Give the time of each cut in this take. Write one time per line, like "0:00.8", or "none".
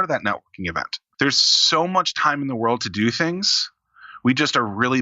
0:01.0